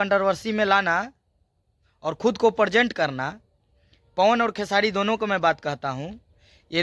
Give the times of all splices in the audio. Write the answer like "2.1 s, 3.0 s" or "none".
none